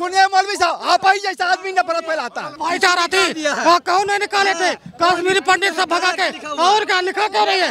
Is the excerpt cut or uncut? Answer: cut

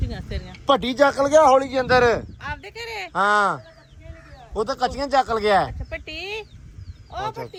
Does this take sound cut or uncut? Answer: uncut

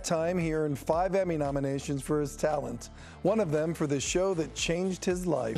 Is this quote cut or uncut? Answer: uncut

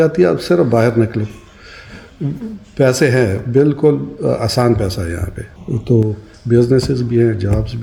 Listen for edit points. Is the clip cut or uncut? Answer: uncut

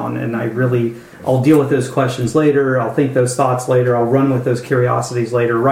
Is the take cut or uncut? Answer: cut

